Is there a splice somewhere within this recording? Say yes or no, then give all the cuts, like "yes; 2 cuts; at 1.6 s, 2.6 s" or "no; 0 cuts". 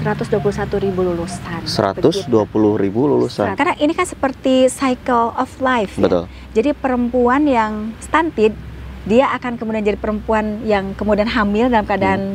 yes; 1 cut; at 3.5 s